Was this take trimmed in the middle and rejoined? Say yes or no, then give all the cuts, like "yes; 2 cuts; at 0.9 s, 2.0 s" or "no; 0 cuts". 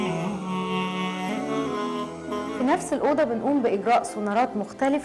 yes; 1 cut; at 2.1 s